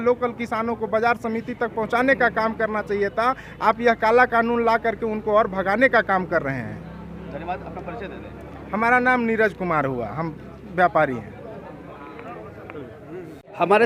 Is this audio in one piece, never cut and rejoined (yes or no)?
yes